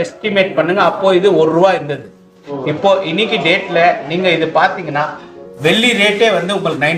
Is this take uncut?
yes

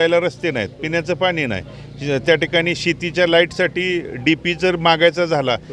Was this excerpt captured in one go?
yes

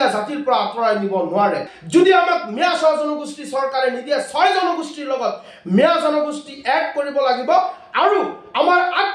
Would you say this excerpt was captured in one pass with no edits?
no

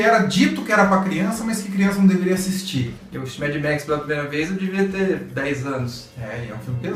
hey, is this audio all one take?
no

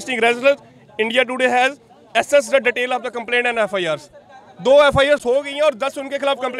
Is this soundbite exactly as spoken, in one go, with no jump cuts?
yes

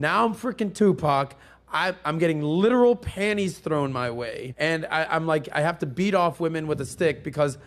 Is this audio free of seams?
no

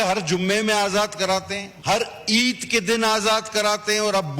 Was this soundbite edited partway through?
yes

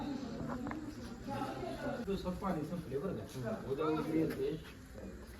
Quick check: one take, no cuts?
no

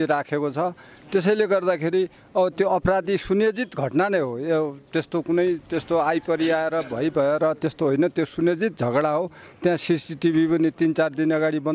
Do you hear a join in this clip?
no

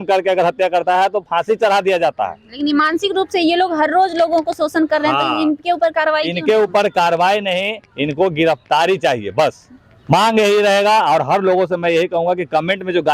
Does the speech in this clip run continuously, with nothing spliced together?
yes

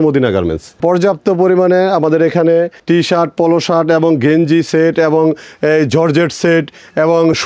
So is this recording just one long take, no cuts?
no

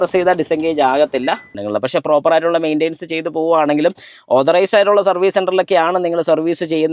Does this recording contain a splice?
yes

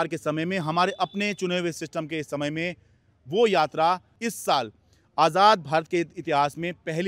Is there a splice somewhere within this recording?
yes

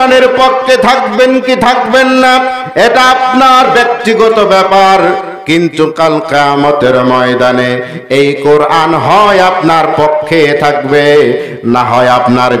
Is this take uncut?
yes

